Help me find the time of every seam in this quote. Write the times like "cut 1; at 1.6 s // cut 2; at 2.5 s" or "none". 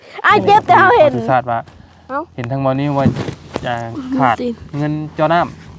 cut 1; at 1.2 s